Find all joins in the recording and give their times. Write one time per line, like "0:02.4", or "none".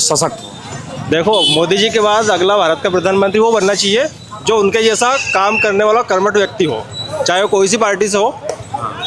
none